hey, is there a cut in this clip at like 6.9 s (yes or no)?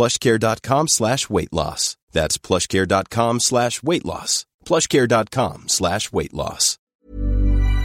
yes